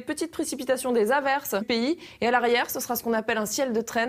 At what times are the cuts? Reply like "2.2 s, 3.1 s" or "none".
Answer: none